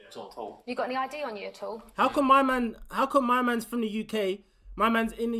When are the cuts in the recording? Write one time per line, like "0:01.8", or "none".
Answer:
none